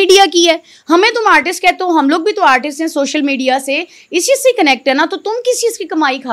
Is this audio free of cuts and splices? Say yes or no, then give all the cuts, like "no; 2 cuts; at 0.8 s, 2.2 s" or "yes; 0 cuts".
yes; 0 cuts